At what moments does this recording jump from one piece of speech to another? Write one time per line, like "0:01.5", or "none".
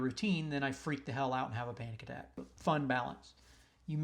0:02.5